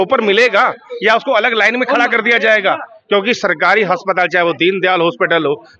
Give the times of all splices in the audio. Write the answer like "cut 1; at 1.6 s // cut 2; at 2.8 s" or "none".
none